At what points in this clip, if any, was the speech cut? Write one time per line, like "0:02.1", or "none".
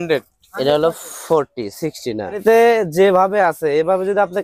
0:02.4